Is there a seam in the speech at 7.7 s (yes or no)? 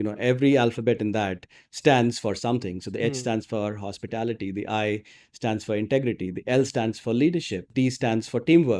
yes